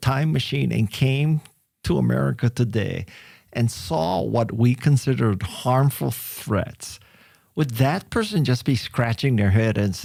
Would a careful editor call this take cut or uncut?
uncut